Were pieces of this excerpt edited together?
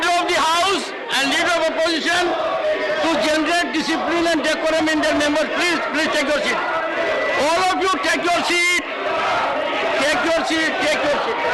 no; 0 cuts

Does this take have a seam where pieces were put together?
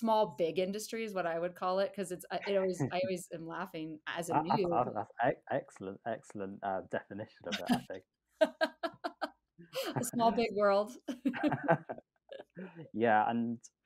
no; 0 cuts

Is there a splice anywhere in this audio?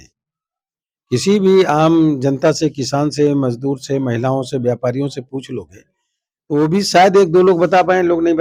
no; 0 cuts

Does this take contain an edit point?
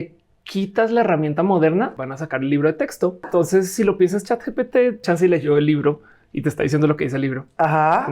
yes; 3 cuts; at 2.0 s, 3.3 s, 5.0 s

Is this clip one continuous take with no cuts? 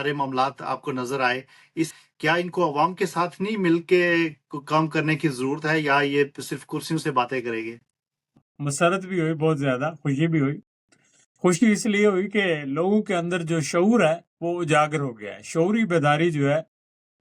no; 2 cuts; at 2.0 s, 8.3 s

